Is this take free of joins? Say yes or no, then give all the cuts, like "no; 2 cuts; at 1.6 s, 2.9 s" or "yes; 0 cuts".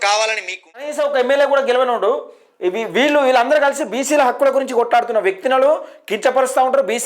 no; 1 cut; at 0.9 s